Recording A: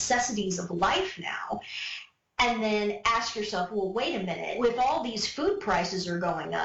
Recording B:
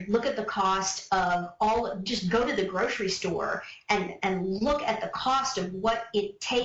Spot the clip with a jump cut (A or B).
A